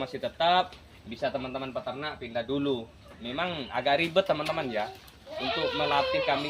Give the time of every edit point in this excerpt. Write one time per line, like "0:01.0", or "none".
none